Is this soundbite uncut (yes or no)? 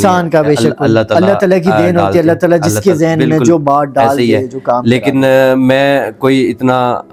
yes